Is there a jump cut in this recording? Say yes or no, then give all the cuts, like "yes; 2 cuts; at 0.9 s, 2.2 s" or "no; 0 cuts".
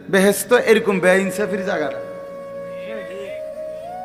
no; 0 cuts